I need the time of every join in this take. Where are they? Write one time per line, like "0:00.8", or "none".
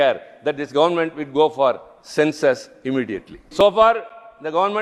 0:03.4